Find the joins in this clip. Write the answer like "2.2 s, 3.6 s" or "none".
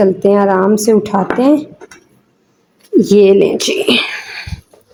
none